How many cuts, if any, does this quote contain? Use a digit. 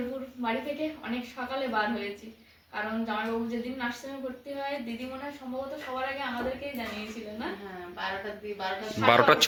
0